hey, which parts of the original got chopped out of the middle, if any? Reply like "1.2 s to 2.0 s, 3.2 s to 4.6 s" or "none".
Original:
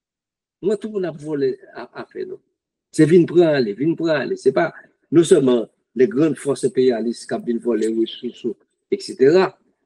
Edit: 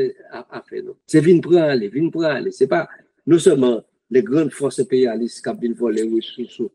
2.4 s to 2.8 s